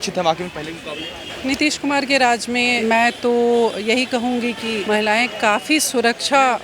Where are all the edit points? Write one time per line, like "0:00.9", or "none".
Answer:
0:01.4
0:02.8
0:04.8